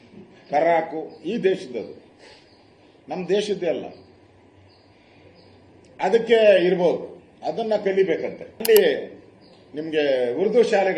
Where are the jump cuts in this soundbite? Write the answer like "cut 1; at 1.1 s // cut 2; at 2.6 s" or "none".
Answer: cut 1; at 8.6 s

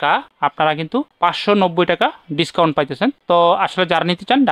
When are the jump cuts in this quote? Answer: none

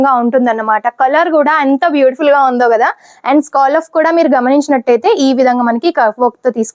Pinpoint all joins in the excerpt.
none

